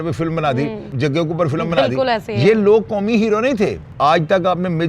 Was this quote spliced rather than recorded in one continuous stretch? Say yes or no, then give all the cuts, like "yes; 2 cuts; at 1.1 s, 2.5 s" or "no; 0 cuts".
yes; 2 cuts; at 0.9 s, 3.9 s